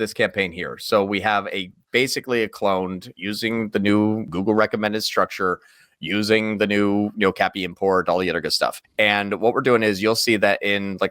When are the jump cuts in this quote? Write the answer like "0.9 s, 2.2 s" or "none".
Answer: 4.3 s, 8.8 s